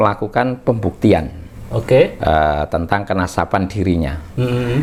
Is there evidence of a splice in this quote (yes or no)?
no